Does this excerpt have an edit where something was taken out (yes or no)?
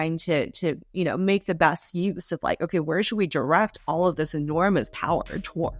no